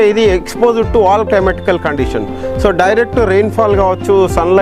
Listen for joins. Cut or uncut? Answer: uncut